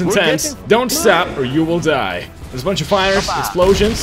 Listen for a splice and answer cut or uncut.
uncut